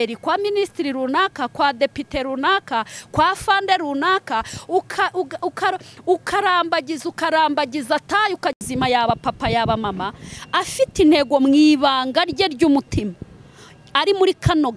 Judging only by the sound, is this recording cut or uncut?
cut